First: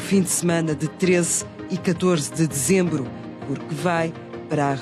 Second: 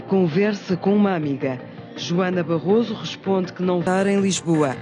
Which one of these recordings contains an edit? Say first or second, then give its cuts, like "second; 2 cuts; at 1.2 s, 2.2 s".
second; 1 cut; at 3.6 s